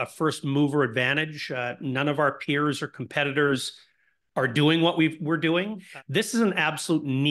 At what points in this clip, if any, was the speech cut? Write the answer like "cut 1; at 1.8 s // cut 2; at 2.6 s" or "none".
cut 1; at 5.8 s